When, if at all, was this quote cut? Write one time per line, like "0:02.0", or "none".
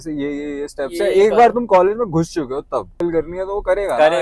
0:03.0